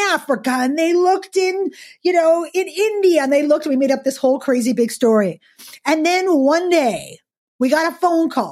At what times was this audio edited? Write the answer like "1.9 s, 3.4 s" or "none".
none